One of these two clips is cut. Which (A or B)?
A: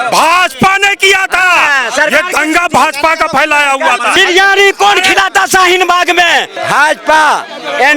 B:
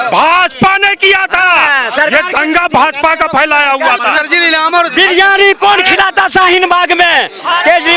A